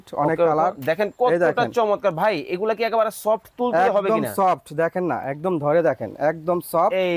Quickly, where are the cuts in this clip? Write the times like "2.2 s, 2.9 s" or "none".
none